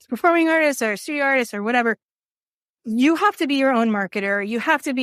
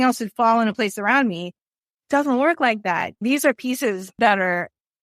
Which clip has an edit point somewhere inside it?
second; 2 cuts; at 3.2 s, 4.2 s

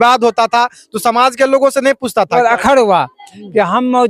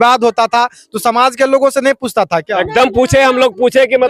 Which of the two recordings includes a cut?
first; 1 cut; at 2.3 s

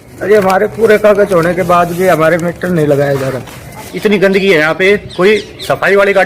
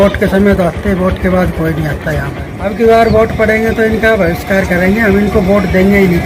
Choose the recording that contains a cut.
first; 1 cut; at 3.7 s

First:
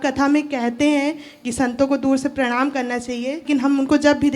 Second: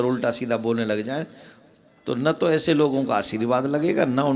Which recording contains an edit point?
first; 1 cut; at 3.4 s

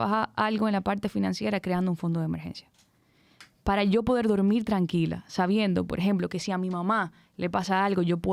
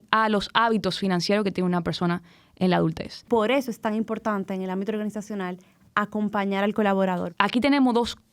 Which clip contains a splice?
second; 2 cuts; at 3.2 s, 7.3 s

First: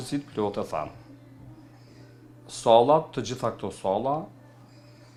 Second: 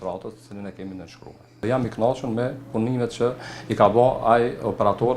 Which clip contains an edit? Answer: second; 1 cut; at 1.6 s

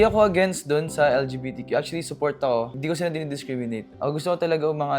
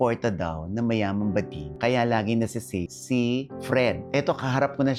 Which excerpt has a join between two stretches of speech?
first; 1 cut; at 3.9 s

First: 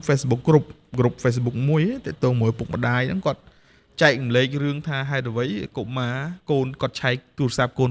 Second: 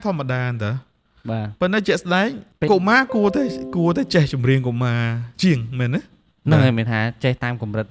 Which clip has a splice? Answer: second; 1 cut; at 2.5 s

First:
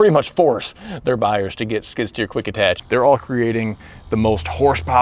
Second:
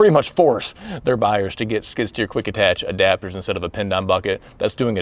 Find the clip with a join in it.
first; 1 cut; at 2.8 s

